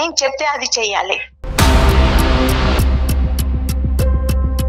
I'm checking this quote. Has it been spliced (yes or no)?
yes